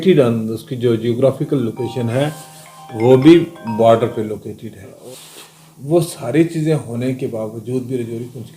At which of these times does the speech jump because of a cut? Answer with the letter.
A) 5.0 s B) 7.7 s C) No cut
A